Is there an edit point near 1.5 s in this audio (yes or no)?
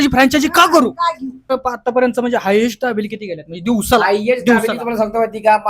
yes